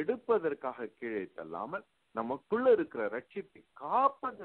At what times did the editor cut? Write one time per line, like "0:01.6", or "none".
none